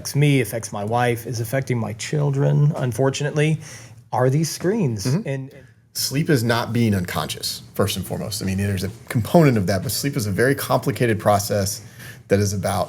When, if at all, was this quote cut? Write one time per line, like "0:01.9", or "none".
0:05.3